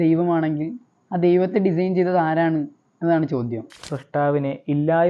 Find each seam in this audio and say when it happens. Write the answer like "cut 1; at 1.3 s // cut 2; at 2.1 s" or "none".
cut 1; at 4.0 s